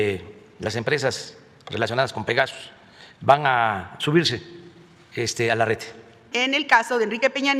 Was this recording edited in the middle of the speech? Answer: yes; 1 cut; at 6.2 s

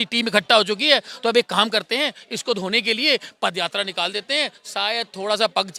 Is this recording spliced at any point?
no; 0 cuts

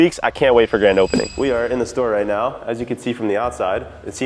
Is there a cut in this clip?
no; 0 cuts

